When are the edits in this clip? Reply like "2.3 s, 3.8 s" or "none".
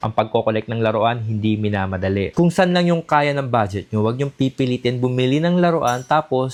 none